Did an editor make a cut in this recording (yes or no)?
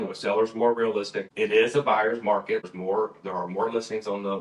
yes